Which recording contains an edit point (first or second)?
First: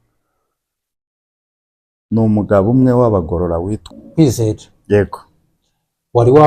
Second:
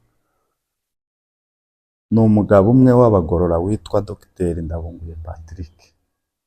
first